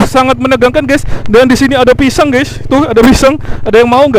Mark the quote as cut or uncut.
uncut